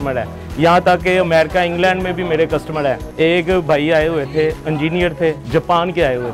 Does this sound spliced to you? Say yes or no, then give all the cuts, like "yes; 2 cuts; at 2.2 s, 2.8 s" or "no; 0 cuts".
yes; 2 cuts; at 3.1 s, 5.4 s